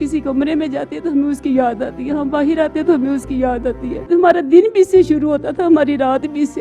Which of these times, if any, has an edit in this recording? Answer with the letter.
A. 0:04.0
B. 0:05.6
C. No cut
A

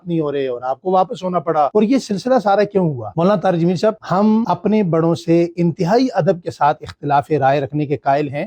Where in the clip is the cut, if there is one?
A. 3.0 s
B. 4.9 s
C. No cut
C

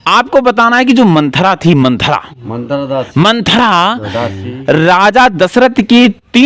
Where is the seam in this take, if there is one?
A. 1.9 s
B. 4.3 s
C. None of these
C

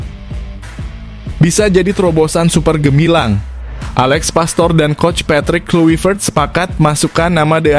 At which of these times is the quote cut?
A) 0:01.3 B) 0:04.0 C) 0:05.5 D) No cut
A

